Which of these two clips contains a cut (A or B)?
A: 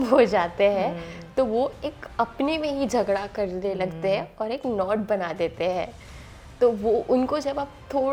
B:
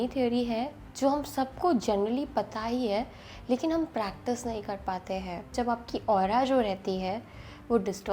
B